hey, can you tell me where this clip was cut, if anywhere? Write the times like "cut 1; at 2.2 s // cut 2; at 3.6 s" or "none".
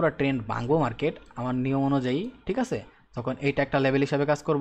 none

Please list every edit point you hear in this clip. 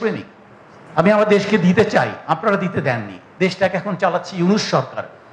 cut 1; at 3.2 s

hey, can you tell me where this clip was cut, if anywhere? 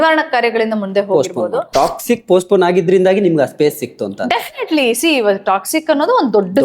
cut 1; at 1.7 s

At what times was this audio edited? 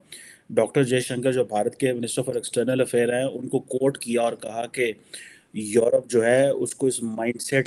none

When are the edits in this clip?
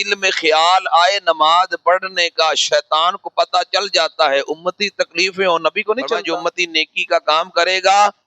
cut 1; at 6.3 s

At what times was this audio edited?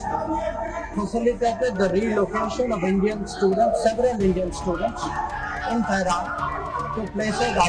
none

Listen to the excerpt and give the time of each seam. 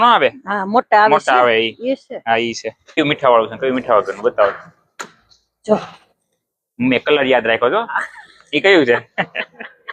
cut 1; at 3.0 s

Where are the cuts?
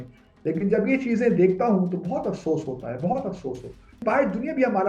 cut 1; at 4.0 s

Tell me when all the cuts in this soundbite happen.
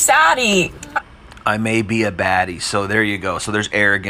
none

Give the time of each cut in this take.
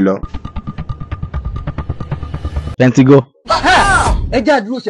none

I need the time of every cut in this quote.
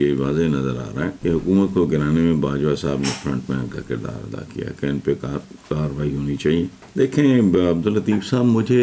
cut 1; at 1.2 s // cut 2; at 6.8 s

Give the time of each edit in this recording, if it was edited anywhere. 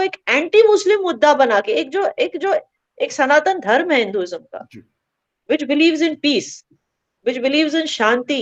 none

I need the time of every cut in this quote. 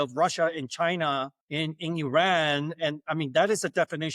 cut 1; at 1.4 s

